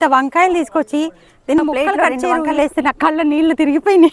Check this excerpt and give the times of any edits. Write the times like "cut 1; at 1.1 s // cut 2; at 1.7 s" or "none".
cut 1; at 2.5 s